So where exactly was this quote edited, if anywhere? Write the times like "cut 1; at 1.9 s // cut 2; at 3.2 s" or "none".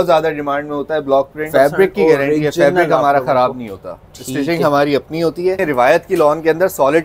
cut 1; at 1.4 s // cut 2; at 5.6 s